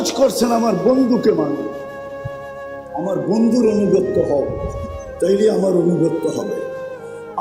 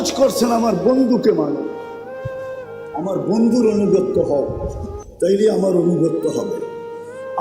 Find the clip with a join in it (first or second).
second